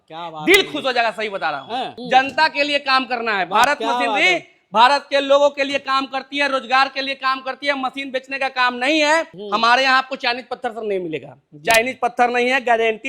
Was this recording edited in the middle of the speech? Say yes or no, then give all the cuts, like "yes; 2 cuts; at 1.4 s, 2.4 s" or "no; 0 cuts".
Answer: yes; 2 cuts; at 1.9 s, 9.4 s